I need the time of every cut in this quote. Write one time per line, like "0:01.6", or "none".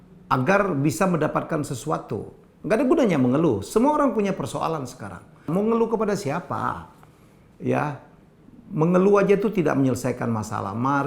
0:05.4